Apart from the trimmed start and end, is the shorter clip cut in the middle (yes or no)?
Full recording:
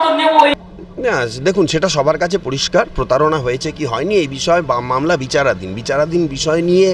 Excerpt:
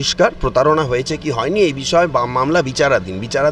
no